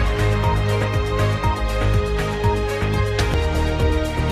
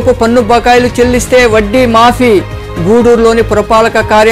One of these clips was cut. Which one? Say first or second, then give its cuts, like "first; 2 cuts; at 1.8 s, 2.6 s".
first; 1 cut; at 3.3 s